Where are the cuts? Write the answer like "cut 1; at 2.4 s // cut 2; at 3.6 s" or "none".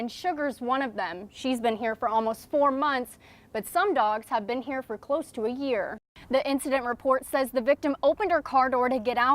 cut 1; at 6.0 s